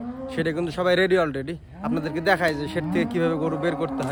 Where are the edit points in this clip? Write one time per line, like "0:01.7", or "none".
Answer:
none